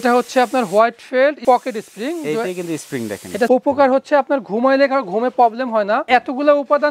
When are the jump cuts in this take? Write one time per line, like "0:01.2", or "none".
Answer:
0:01.4
0:03.5
0:06.0

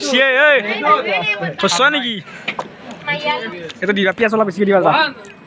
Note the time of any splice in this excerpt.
0:03.5

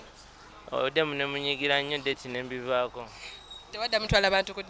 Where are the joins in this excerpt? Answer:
none

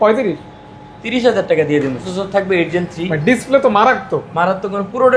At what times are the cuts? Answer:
0:02.1

